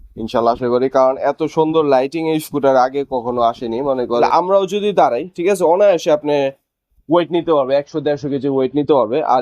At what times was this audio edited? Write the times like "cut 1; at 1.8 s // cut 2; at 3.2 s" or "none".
cut 1; at 4.2 s

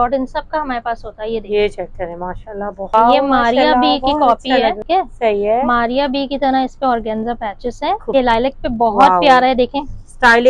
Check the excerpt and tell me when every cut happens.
cut 1; at 2.9 s // cut 2; at 4.8 s // cut 3; at 8.1 s

